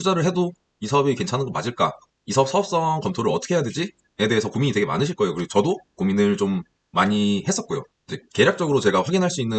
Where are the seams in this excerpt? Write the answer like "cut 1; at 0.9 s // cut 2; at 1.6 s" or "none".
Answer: cut 1; at 7.9 s